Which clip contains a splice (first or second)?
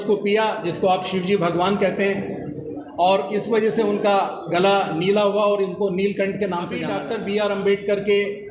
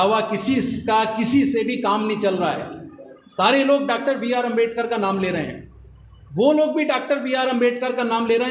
first